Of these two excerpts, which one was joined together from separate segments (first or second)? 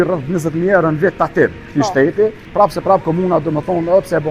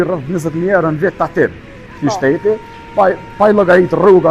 first